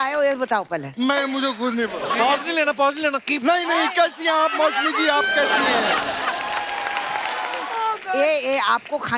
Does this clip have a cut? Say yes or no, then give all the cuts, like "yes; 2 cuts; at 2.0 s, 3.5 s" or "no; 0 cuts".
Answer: yes; 2 cuts; at 2.1 s, 7.6 s